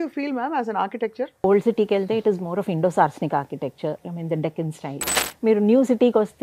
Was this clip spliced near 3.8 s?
no; 1 cut; at 1.3 s

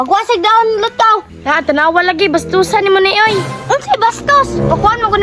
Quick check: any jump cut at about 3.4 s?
no; 0 cuts

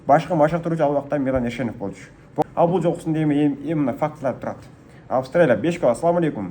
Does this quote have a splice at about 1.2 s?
no; 1 cut; at 2.4 s

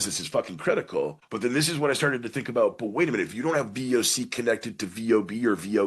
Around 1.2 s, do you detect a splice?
yes; 1 cut; at 1.2 s

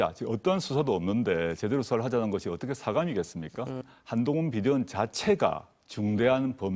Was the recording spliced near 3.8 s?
yes; 1 cut; at 3.8 s

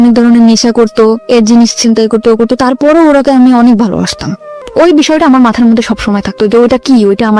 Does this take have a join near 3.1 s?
no; 1 cut; at 4.6 s

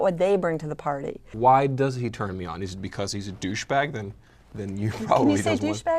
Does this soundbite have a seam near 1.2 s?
yes; 1 cut; at 1.2 s

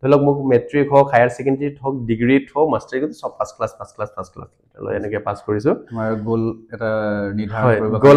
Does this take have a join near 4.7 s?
no; 0 cuts

